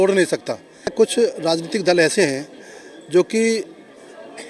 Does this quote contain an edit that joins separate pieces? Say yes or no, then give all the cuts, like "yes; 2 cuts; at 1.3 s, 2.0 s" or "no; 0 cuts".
yes; 1 cut; at 0.9 s